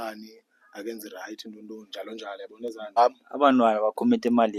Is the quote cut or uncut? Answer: cut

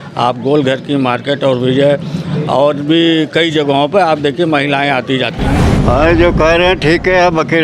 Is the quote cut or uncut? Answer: cut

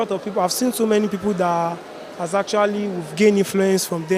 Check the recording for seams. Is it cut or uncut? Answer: uncut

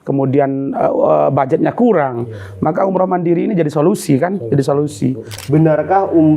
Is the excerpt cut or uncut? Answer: cut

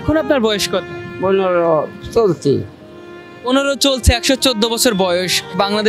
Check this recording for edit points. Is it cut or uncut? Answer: cut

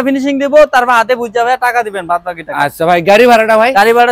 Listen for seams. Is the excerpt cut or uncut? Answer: uncut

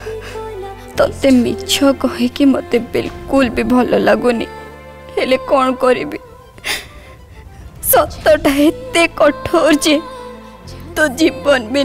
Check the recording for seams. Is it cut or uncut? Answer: uncut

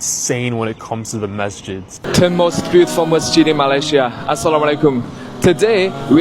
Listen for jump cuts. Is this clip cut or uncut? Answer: cut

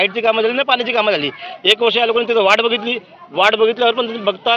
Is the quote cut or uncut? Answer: uncut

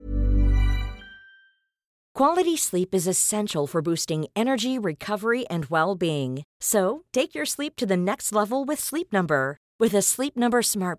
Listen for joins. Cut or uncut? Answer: cut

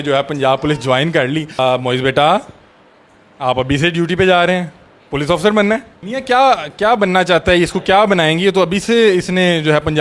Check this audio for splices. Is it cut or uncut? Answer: uncut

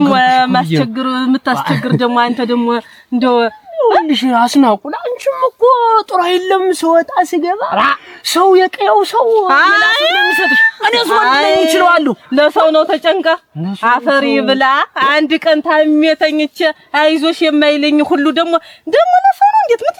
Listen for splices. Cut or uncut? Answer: uncut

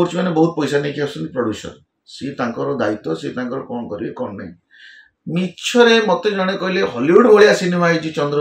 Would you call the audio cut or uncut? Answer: uncut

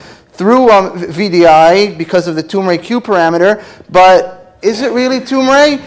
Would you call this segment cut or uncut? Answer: uncut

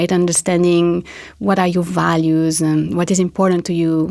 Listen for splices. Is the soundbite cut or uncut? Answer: uncut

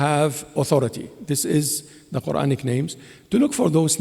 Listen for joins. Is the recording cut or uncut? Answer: uncut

